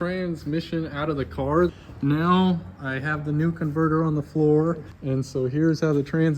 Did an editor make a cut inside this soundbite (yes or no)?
yes